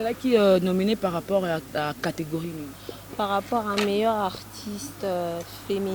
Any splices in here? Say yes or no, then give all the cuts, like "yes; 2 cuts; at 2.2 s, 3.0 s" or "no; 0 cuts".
no; 0 cuts